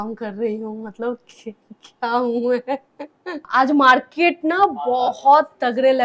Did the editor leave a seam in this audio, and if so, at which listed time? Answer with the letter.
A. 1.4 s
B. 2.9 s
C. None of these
C